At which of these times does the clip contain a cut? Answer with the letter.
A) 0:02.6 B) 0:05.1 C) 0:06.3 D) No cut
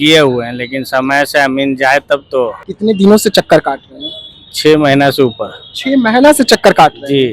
A